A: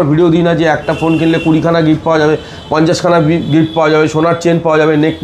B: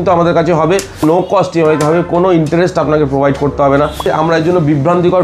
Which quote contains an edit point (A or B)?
B